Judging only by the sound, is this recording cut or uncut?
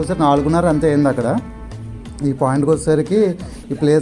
uncut